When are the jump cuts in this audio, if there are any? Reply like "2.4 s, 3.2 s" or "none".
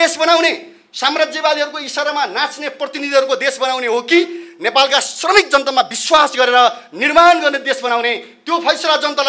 none

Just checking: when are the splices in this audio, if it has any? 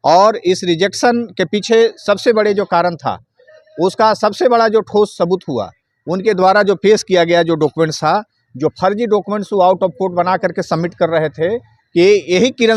none

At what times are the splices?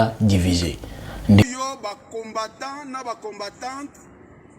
1.5 s

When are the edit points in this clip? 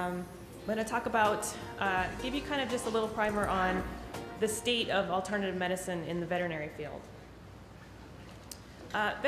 none

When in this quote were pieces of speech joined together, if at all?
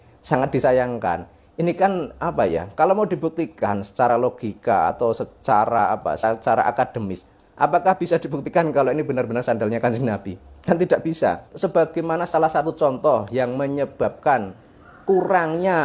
11.5 s

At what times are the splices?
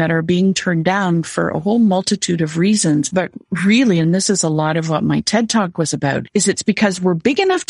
3.1 s, 6.2 s

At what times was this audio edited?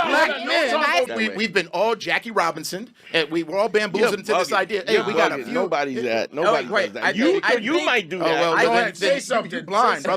1.1 s

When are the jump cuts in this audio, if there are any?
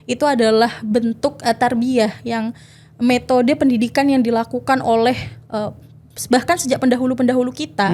none

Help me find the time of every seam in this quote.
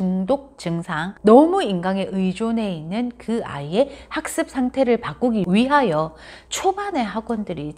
1.1 s

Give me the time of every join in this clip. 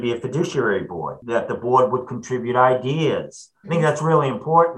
1.1 s, 3.6 s

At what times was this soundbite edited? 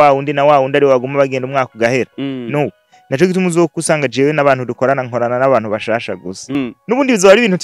6.6 s

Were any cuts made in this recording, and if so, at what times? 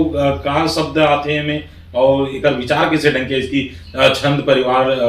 none

